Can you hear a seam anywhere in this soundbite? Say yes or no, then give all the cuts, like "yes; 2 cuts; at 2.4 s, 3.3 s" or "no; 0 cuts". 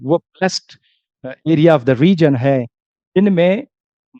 no; 0 cuts